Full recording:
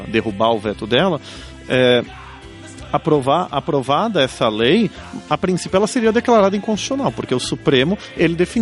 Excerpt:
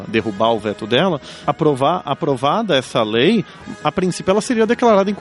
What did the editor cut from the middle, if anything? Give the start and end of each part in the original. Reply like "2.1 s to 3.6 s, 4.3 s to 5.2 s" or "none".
1.3 s to 2.8 s